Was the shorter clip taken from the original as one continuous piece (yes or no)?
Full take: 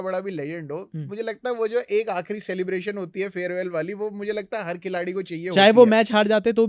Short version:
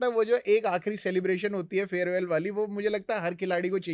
yes